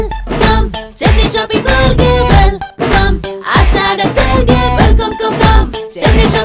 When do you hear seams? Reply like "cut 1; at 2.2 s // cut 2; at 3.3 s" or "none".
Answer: none